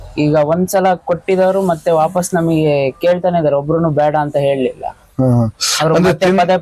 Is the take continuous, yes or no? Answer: yes